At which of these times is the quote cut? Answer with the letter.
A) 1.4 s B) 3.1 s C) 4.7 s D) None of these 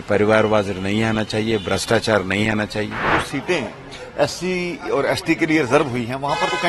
B